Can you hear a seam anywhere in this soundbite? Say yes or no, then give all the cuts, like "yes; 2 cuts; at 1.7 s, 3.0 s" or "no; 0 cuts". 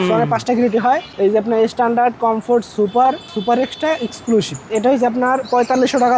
no; 0 cuts